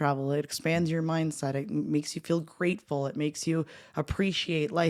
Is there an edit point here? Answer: no; 0 cuts

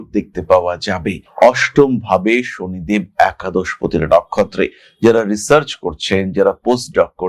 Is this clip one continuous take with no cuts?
no; 1 cut; at 1.2 s

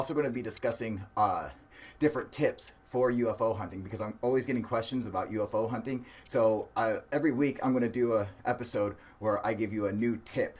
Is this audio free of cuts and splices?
yes; 0 cuts

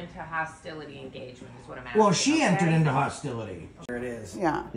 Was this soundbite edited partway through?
yes; 1 cut; at 3.8 s

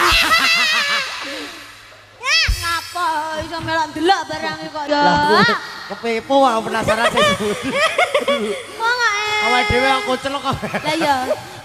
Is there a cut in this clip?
no; 0 cuts

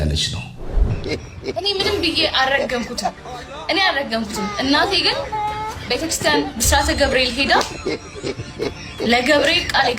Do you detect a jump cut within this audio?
yes; 1 cut; at 1.0 s

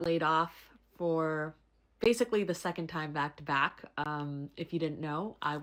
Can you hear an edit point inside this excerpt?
no; 0 cuts

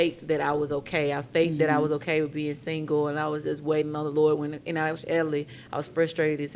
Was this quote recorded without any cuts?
yes; 0 cuts

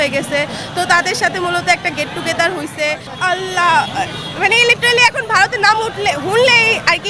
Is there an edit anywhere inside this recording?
yes; 1 cut; at 3.1 s

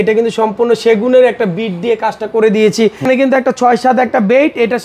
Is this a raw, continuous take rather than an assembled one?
no; 1 cut; at 3.1 s

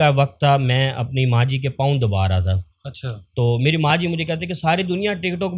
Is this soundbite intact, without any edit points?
yes; 0 cuts

